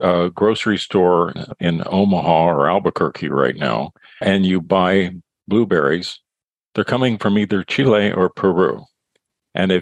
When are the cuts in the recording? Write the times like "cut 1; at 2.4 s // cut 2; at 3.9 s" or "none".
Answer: cut 1; at 1.4 s // cut 2; at 4.2 s